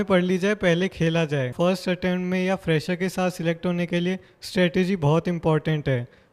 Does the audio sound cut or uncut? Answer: cut